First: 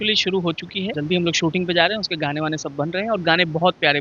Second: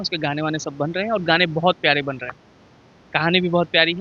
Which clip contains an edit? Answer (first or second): first